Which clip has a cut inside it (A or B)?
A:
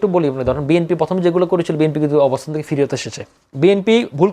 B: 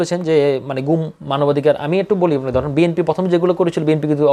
A